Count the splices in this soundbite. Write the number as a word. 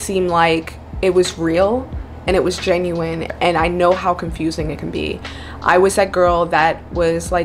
one